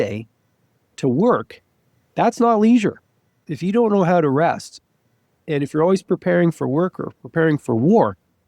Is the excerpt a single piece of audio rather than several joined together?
no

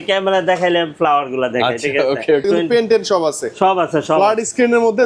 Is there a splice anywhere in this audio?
yes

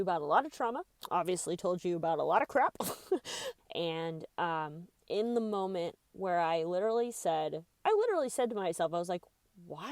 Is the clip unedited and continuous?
no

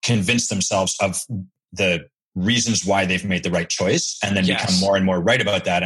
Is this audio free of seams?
no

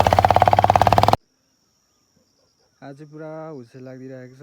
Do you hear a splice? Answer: yes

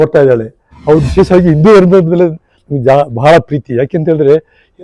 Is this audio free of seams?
no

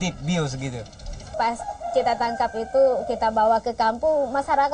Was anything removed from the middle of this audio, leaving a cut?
yes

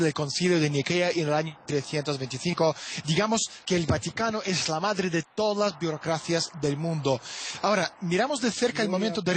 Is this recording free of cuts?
no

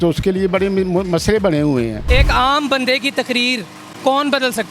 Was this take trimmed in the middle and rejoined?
yes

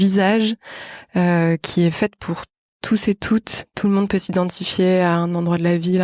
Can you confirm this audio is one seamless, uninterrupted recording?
no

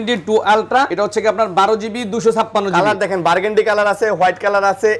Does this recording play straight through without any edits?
no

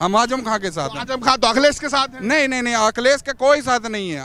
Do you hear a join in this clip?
no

